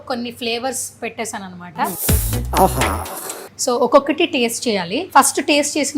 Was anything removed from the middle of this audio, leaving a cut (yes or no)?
yes